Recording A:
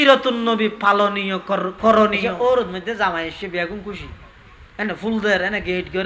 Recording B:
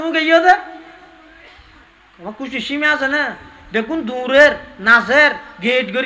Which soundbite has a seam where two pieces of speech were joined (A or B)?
A